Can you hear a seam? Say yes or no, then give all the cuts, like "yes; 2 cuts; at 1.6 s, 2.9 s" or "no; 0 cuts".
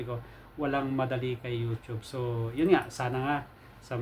no; 0 cuts